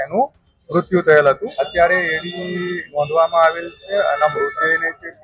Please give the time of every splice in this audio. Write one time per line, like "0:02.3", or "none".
0:01.5